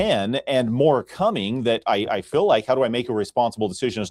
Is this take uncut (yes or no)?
yes